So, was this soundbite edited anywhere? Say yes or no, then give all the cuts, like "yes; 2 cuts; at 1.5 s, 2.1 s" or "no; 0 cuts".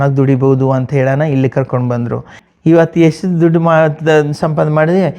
yes; 1 cut; at 2.3 s